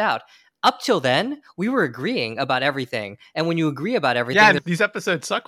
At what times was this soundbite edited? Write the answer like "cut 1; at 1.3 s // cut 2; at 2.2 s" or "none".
cut 1; at 4.6 s